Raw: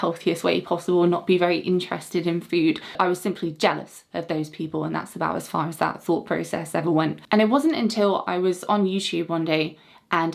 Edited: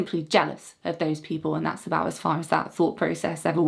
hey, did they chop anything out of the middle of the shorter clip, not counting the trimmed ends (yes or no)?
no